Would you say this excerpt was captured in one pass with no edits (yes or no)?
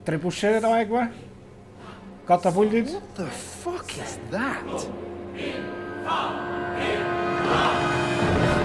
no